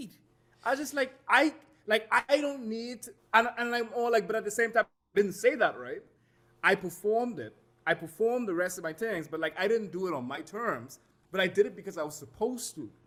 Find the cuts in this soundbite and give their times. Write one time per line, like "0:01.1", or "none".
none

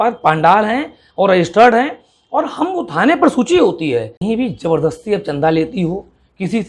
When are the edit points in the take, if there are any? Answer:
0:04.2

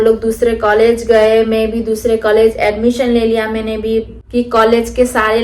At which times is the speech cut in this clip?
0:04.2

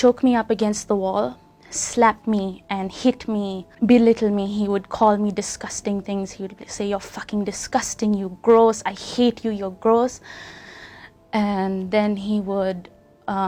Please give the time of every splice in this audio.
none

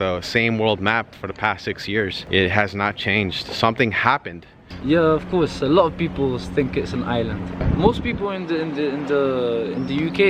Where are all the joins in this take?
0:02.2
0:04.7
0:07.6

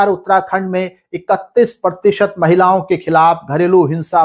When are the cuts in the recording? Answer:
none

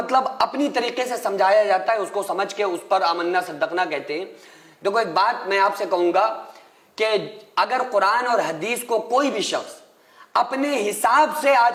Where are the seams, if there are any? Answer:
none

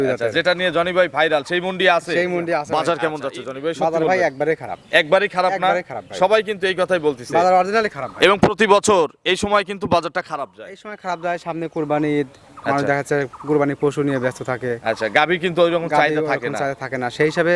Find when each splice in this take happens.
0:02.7

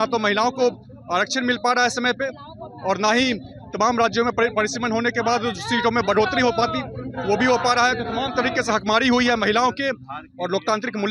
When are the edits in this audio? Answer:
none

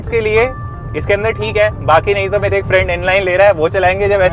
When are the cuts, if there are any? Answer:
none

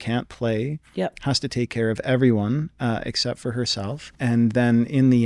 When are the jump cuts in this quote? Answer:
0:04.1

